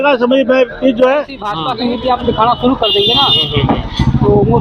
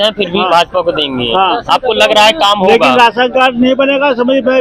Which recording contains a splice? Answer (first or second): first